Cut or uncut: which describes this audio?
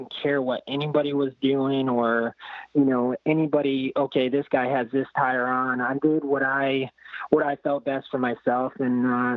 uncut